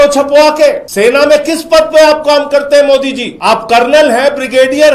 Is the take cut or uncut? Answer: cut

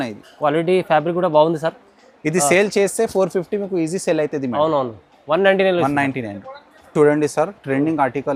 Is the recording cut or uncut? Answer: uncut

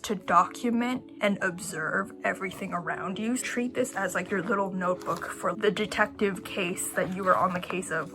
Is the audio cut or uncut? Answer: cut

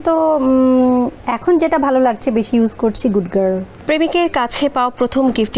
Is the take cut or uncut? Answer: uncut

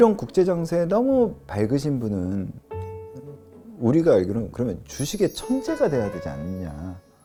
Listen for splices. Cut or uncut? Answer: uncut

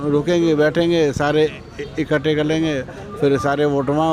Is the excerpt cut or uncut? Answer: uncut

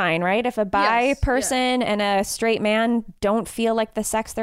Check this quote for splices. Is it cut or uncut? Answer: uncut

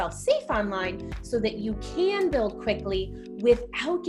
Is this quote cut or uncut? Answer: uncut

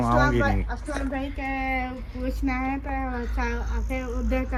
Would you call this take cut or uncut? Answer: uncut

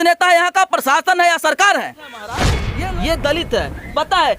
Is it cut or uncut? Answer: cut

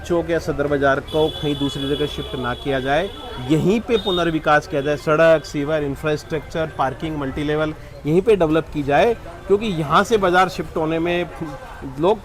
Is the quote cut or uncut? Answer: uncut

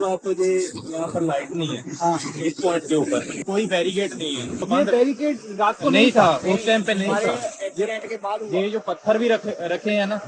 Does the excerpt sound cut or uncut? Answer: cut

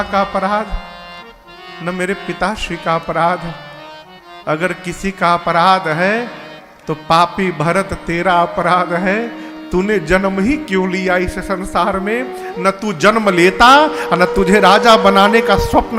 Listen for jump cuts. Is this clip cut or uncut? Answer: uncut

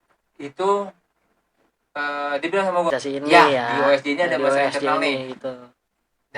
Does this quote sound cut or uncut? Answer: cut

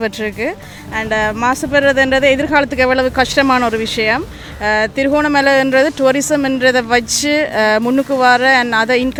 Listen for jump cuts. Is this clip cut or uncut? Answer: uncut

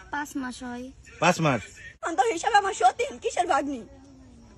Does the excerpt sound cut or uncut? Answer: cut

